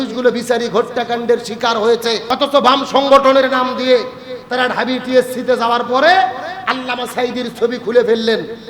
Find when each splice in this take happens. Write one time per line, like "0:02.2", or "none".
0:02.2